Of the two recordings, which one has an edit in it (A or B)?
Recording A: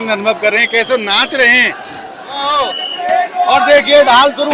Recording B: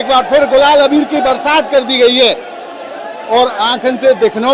A